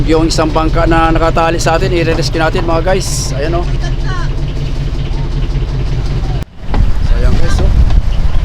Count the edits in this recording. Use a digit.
1